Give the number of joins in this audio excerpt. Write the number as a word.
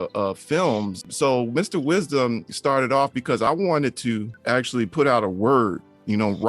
three